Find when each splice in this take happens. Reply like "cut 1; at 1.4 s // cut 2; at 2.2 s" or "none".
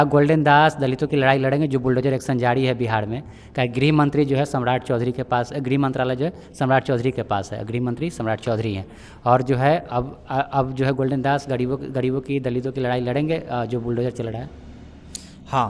none

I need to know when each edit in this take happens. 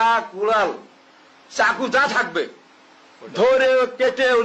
none

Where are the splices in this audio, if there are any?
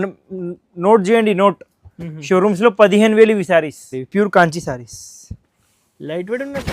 cut 1; at 4.0 s

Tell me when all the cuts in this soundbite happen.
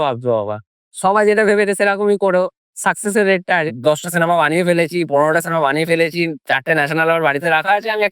cut 1; at 3.7 s

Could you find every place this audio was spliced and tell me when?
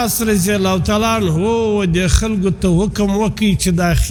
none

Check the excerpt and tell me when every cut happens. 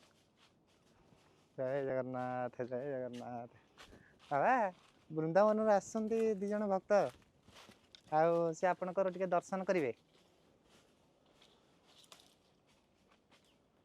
none

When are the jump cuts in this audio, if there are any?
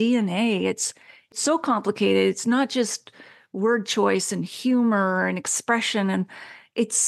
none

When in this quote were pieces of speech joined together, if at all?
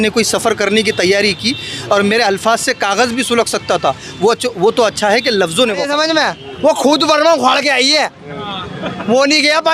cut 1; at 5.9 s

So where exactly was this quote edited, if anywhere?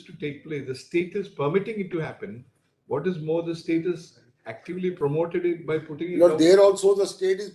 none

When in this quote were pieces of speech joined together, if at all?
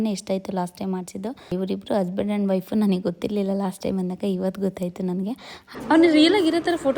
cut 1; at 1.5 s // cut 2; at 5.5 s

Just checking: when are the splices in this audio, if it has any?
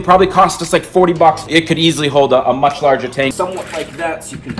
cut 1; at 1.4 s // cut 2; at 3.3 s

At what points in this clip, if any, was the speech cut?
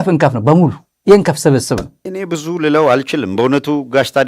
cut 1; at 2.0 s

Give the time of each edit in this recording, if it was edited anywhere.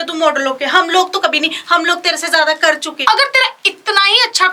cut 1; at 2.9 s

